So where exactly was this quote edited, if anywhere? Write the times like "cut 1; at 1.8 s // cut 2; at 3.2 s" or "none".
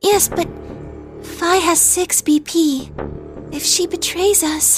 none